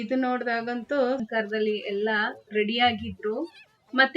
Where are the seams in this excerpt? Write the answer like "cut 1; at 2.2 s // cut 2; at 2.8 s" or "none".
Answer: cut 1; at 1.2 s